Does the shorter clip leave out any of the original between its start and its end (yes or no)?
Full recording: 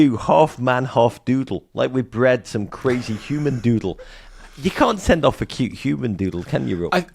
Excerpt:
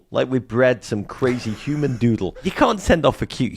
yes